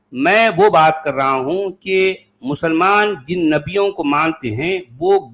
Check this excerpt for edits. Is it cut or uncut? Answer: uncut